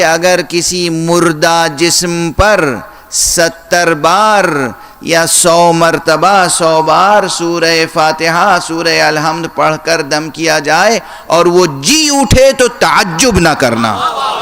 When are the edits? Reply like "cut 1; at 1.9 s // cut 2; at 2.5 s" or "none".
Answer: none

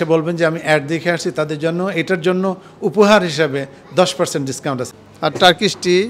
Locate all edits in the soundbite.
cut 1; at 4.8 s

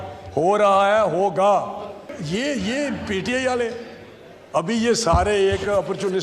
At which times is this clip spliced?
cut 1; at 2.1 s

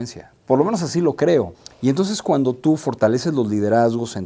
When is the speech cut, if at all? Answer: cut 1; at 1.6 s

